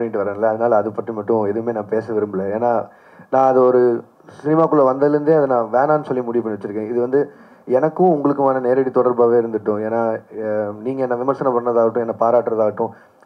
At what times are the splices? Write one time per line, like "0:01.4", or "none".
none